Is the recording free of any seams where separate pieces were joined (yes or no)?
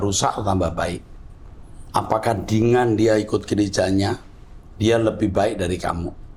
yes